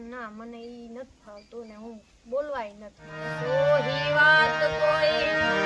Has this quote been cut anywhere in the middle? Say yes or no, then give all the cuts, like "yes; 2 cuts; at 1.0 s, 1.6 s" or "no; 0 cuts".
yes; 1 cut; at 3.2 s